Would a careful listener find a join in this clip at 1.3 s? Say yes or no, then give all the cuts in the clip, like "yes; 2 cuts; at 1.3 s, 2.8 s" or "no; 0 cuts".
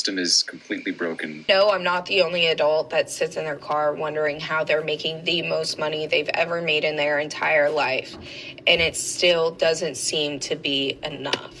yes; 1 cut; at 1.3 s